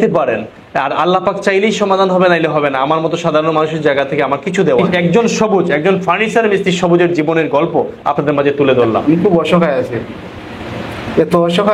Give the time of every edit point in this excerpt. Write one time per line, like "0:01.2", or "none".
0:04.9
0:09.0